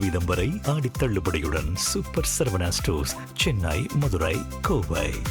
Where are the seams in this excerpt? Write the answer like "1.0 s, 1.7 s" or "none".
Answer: none